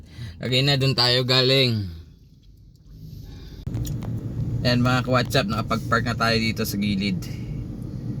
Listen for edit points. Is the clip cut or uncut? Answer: cut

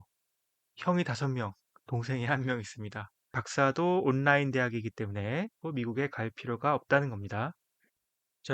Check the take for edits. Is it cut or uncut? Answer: cut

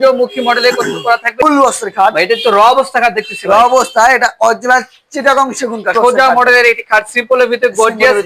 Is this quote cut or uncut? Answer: cut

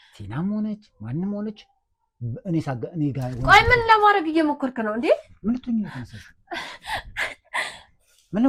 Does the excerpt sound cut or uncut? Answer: uncut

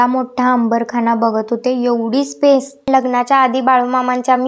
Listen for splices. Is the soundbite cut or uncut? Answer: cut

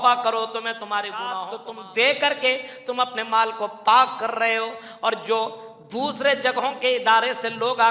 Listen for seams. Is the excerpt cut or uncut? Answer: cut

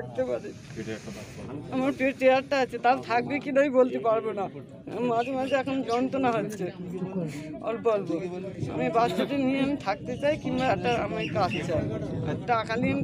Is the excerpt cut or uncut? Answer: uncut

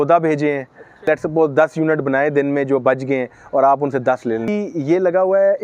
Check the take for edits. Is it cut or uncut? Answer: cut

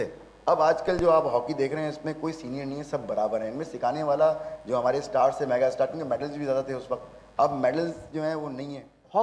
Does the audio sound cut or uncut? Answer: uncut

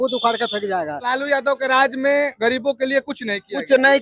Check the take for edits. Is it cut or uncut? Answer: cut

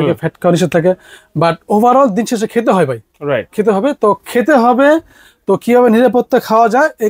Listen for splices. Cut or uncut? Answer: uncut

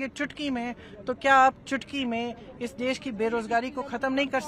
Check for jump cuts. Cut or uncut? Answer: uncut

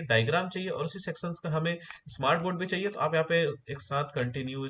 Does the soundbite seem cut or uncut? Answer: uncut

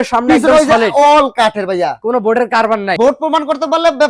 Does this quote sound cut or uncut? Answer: cut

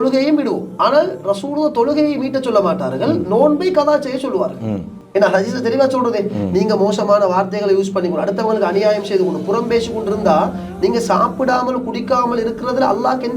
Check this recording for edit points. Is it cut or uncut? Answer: cut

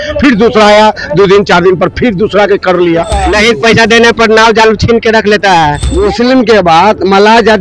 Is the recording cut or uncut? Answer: cut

